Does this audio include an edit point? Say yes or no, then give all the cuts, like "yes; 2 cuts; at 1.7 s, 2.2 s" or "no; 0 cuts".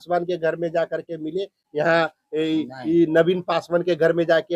no; 0 cuts